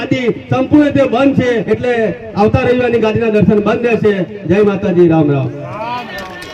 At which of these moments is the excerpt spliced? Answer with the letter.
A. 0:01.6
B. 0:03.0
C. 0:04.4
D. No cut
A